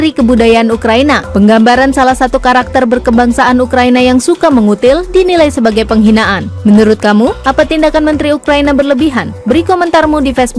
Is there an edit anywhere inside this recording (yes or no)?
no